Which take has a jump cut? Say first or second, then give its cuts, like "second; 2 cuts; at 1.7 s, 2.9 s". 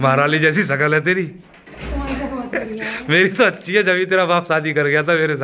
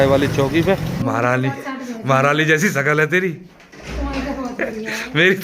second; 1 cut; at 0.9 s